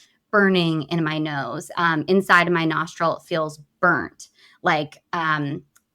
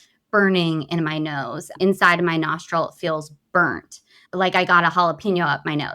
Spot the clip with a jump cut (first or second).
second